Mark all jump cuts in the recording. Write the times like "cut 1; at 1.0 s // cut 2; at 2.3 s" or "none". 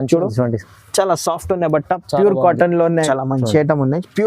cut 1; at 3.1 s